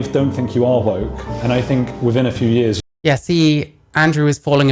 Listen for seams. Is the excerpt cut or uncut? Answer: uncut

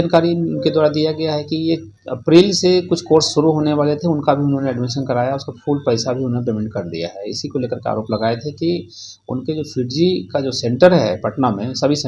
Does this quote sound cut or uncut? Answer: uncut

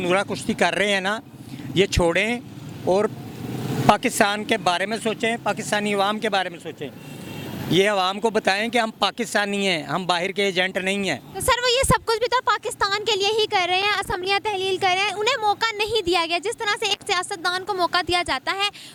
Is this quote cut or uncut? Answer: uncut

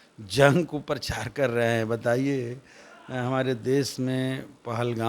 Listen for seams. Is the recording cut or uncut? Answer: uncut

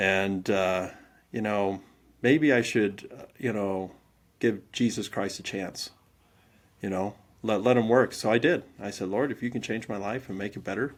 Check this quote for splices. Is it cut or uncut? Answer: uncut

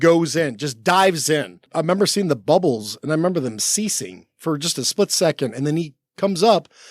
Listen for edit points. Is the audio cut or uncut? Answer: cut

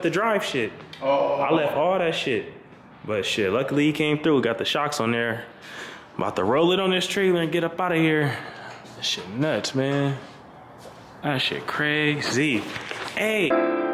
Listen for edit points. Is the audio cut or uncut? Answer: uncut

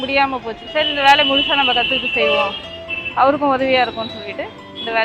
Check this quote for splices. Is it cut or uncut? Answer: uncut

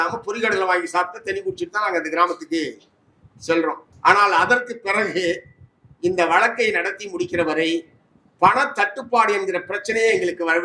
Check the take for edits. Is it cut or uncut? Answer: cut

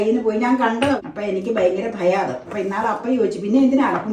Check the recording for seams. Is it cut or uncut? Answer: cut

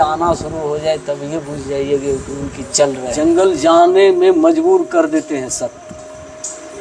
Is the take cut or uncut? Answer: cut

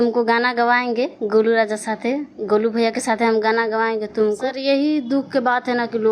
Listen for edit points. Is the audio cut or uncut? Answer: cut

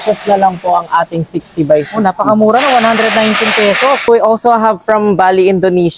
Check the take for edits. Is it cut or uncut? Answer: cut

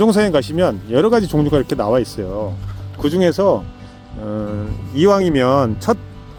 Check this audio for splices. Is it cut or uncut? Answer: uncut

